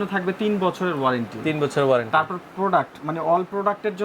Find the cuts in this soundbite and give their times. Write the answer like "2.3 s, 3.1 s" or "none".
none